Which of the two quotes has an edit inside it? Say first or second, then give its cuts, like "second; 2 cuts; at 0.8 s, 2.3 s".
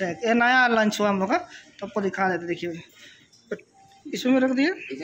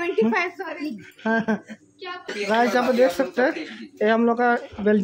second; 1 cut; at 2.3 s